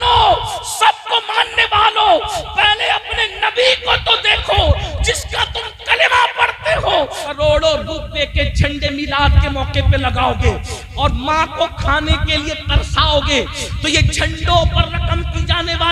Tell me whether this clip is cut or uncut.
cut